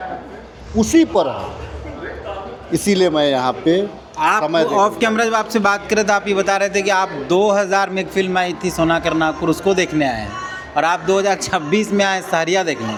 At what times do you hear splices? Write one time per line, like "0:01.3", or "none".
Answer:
none